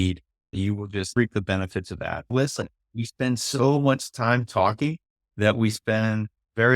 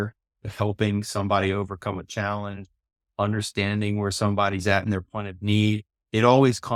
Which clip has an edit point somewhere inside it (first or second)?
first